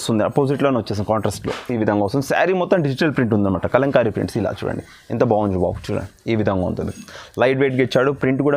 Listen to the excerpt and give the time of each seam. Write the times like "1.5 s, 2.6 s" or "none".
none

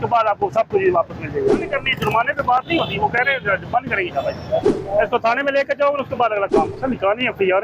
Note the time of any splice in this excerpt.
1.6 s, 4.8 s, 6.7 s

